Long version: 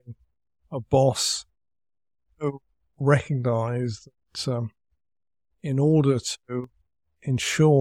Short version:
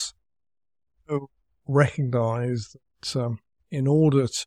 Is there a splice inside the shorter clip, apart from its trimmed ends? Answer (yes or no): yes